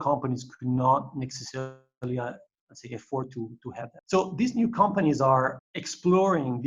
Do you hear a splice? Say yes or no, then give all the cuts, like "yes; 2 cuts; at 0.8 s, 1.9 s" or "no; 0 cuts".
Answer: yes; 2 cuts; at 4.0 s, 5.6 s